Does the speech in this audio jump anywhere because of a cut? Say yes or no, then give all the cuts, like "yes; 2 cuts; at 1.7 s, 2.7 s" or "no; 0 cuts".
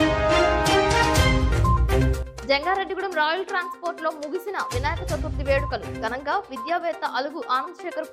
no; 0 cuts